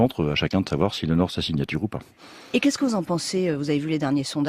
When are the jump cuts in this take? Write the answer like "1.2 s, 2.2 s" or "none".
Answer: none